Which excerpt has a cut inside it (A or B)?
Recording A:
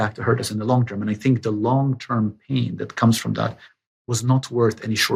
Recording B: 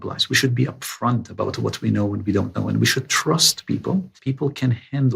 B